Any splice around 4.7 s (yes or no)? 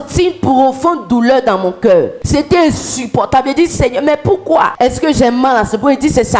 yes